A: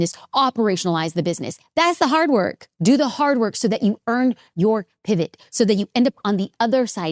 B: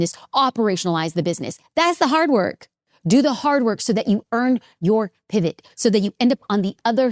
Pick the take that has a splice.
A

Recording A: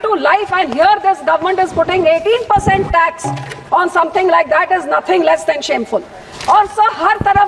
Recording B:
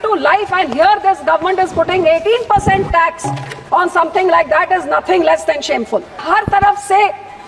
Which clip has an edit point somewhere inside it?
B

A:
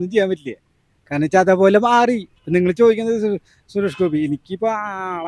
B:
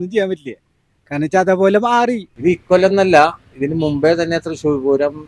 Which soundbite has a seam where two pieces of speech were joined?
B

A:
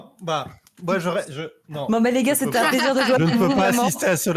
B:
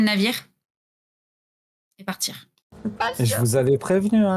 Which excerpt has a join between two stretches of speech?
B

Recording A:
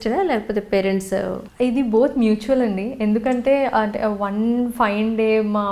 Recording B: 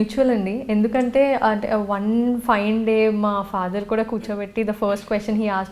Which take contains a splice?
A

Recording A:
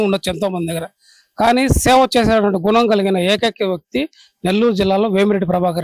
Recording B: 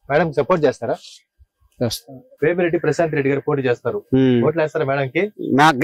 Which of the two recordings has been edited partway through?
B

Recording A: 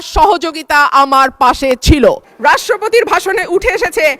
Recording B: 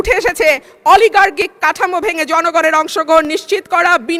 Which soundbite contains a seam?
A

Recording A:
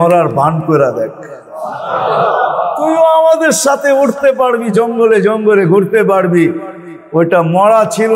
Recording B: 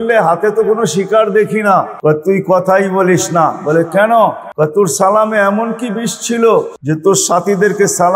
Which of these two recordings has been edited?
B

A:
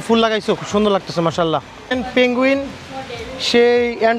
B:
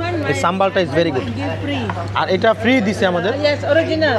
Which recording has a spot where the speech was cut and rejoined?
A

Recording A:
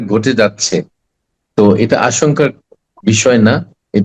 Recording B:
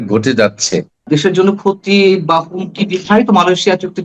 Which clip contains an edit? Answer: B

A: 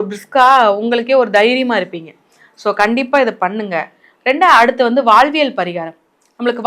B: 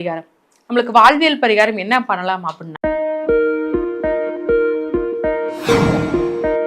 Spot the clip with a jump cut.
B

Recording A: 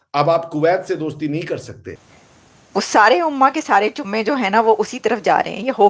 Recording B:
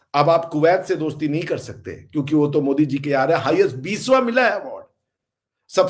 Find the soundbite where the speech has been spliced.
A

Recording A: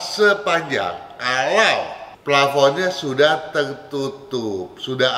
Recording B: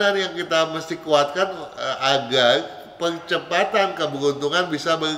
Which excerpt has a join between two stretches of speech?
A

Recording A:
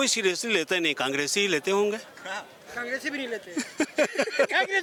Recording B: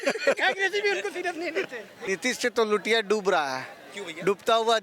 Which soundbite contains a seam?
B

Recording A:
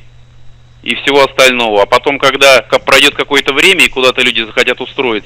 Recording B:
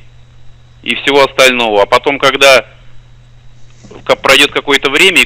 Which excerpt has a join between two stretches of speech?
A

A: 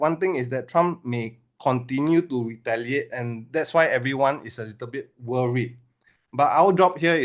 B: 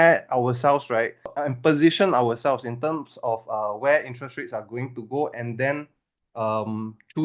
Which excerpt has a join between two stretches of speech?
B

